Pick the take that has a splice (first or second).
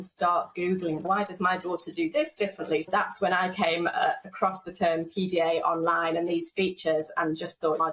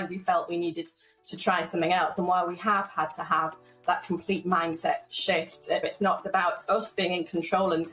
first